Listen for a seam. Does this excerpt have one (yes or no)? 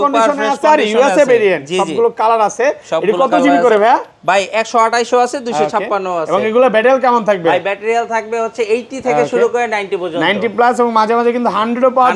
no